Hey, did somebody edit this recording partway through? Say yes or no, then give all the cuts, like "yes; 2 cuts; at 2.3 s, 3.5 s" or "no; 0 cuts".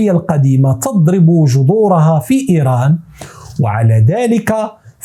no; 0 cuts